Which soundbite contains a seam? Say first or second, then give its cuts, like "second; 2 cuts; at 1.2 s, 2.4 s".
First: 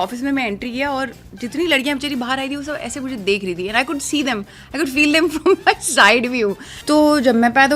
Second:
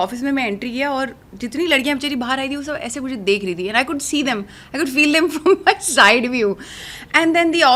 first; 1 cut; at 6.7 s